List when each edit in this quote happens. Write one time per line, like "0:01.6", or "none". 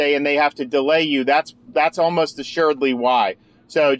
none